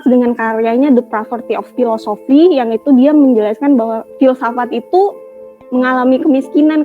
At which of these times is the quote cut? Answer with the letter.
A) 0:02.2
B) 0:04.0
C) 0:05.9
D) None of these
B